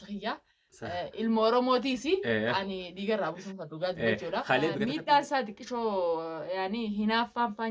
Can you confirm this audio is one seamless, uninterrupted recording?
no; 1 cut; at 4.8 s

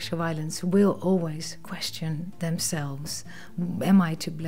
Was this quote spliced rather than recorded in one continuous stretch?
no; 0 cuts

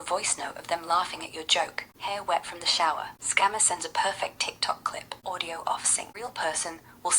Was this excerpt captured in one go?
no; 4 cuts; at 1.9 s, 3.2 s, 5.1 s, 6.0 s

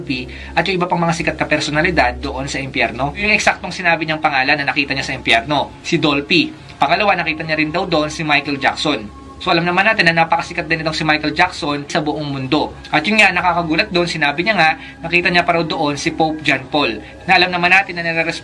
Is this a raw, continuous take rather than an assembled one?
no; 2 cuts; at 3.2 s, 12.8 s

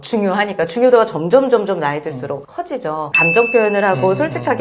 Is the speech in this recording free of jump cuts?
no; 1 cut; at 3.1 s

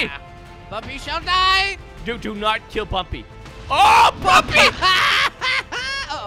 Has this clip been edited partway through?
no; 0 cuts

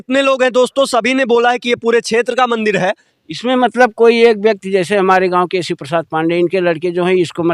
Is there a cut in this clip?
yes; 1 cut; at 3.1 s

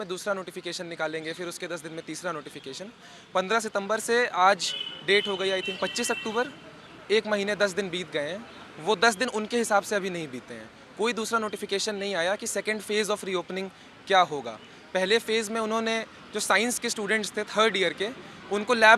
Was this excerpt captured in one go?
yes; 0 cuts

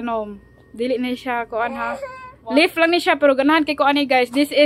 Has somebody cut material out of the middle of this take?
no; 0 cuts

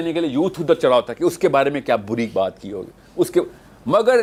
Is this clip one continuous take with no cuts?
yes; 0 cuts

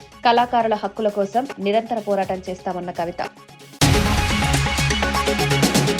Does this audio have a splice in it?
yes; 1 cut; at 3.8 s

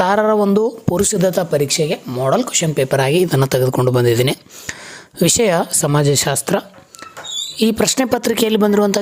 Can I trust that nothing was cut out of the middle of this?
yes; 0 cuts

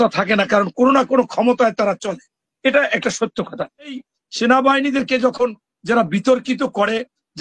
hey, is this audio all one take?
no; 1 cut; at 4.0 s

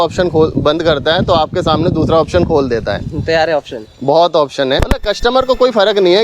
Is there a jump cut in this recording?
yes; 1 cut; at 4.9 s

